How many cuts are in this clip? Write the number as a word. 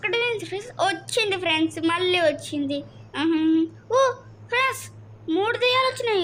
zero